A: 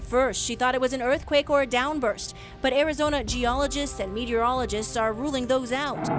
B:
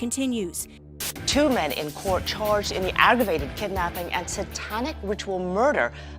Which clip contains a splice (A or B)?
B